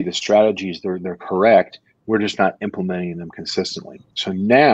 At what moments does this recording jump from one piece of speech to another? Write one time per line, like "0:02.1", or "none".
none

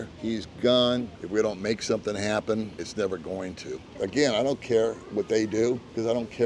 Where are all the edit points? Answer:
0:01.1
0:03.9

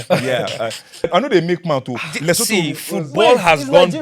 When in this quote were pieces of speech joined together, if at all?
0:01.1

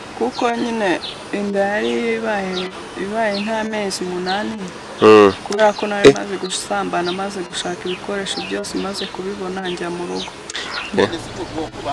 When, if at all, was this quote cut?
0:10.9

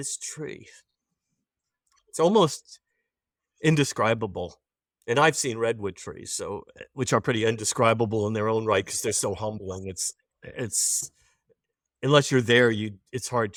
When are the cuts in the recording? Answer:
none

